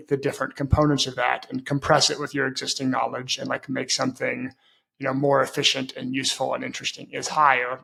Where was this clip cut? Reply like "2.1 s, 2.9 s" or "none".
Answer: none